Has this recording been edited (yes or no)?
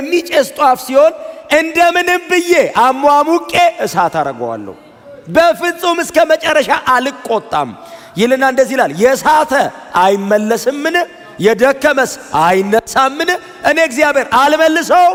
no